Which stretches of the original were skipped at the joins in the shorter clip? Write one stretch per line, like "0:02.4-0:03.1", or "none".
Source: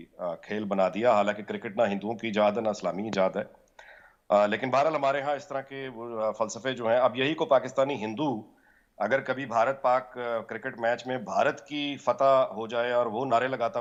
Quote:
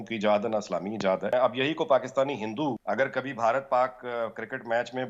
0:03.5-0:06.9
0:08.4-0:08.9